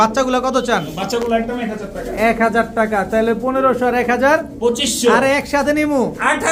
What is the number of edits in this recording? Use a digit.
0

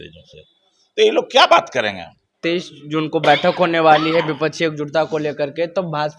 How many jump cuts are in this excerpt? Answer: 1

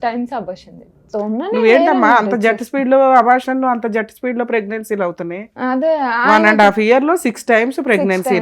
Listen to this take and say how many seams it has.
1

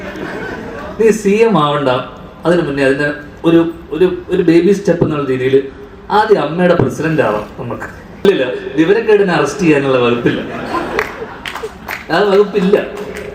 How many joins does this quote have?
1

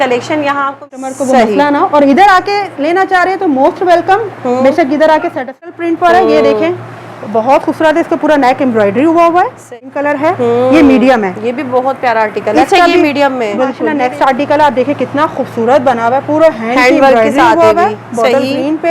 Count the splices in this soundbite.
4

